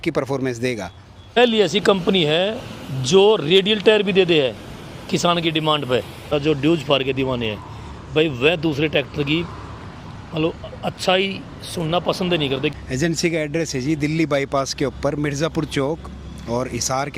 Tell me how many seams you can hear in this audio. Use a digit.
3